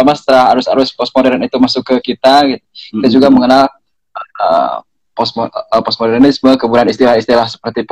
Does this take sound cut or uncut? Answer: uncut